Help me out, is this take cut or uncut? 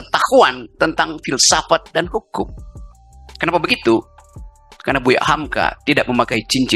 uncut